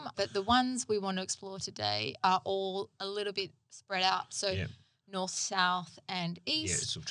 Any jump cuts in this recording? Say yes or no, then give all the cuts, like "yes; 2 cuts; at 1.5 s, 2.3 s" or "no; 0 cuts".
no; 0 cuts